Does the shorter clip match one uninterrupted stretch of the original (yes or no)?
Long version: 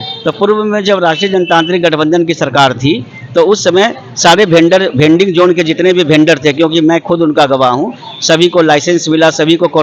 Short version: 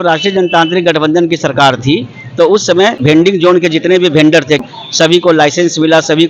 no